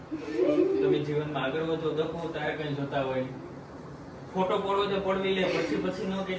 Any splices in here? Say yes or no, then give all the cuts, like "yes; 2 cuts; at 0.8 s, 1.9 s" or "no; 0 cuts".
no; 0 cuts